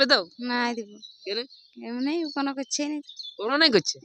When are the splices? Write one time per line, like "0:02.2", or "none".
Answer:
none

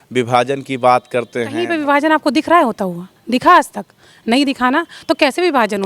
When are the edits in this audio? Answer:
0:01.6

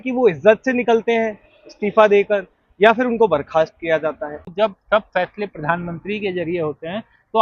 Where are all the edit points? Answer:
0:04.5

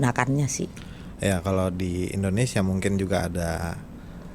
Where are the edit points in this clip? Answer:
none

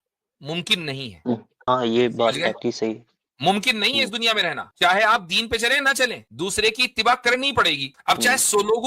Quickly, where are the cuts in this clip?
0:01.7
0:04.7
0:06.2
0:07.9

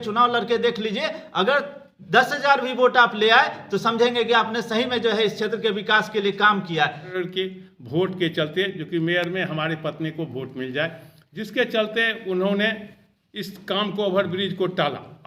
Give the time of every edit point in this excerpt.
0:07.1

